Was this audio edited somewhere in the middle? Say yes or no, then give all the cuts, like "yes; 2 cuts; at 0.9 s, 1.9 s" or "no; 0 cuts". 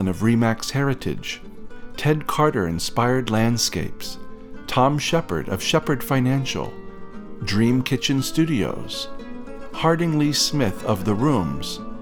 no; 0 cuts